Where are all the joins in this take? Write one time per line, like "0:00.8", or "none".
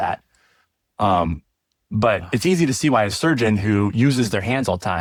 none